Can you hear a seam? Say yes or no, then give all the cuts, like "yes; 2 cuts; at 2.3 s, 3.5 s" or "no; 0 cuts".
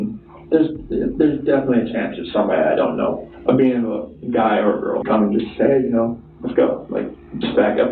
yes; 1 cut; at 5.0 s